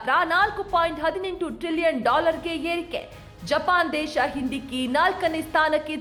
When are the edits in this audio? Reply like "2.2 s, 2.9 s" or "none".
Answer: none